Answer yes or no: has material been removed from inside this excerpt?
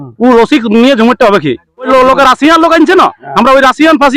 yes